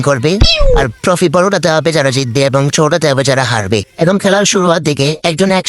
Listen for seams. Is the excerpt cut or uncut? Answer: uncut